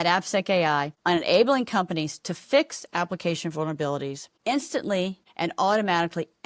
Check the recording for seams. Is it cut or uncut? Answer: cut